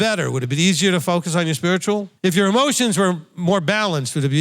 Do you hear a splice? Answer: yes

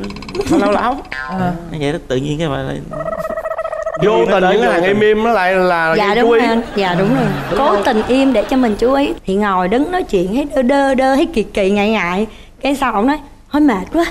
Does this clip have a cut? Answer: yes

